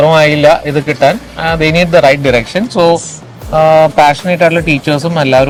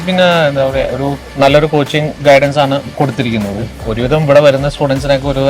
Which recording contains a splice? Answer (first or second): second